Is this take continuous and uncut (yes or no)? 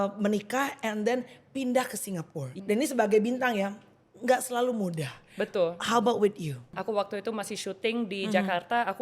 no